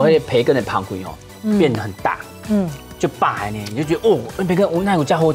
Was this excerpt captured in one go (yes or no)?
yes